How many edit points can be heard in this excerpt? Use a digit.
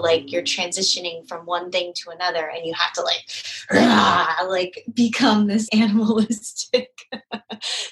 1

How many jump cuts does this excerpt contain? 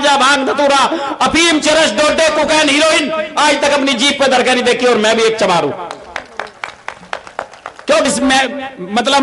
1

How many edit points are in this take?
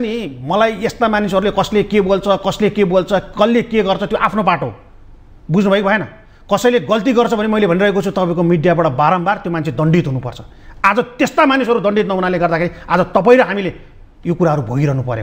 0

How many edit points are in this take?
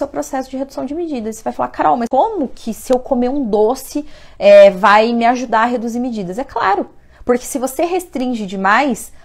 1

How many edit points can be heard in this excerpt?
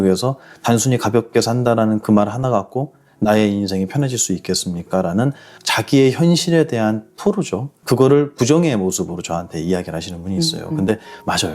0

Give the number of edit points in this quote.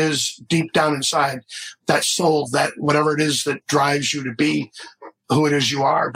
0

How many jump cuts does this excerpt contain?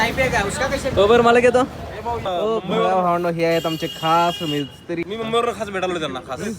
3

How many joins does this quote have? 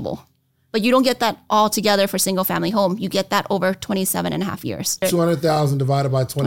1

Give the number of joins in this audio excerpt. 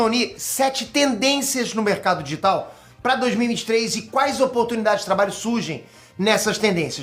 0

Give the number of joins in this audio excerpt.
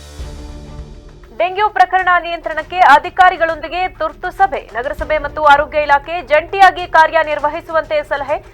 1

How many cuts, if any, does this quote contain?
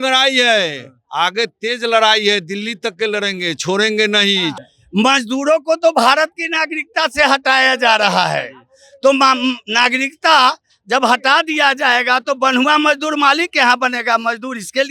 1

